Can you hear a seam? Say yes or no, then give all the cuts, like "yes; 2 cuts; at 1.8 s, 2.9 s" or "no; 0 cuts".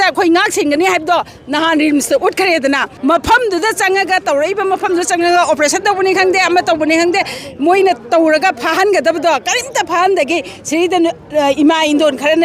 yes; 1 cut; at 2.9 s